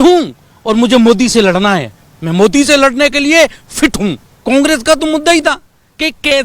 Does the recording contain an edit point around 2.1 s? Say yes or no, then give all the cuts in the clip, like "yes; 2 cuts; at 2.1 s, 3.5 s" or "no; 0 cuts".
no; 1 cut; at 4.3 s